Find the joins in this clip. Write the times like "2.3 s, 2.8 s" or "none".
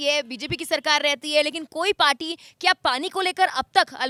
none